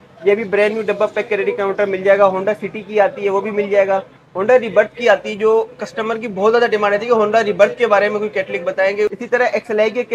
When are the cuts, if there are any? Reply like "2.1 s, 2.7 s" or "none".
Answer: 9.2 s